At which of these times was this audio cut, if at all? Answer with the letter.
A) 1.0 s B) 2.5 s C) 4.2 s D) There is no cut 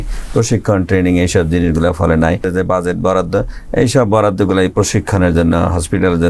B